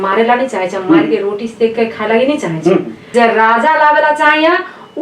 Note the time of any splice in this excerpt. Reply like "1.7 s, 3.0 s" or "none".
3.0 s

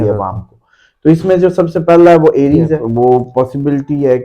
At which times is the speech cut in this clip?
2.8 s

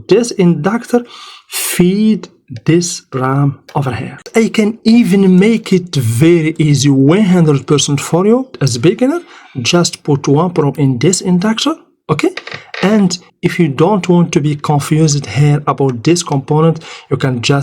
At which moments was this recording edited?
4.3 s

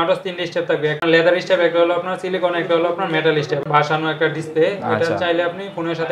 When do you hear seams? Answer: 1.0 s, 3.6 s

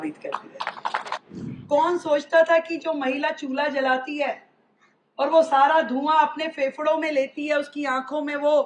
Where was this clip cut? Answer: 1.0 s

